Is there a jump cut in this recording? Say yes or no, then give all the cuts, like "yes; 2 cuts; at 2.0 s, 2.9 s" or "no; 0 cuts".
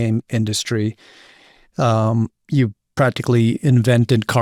no; 0 cuts